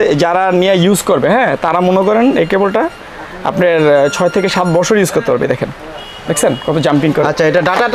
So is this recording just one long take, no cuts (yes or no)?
yes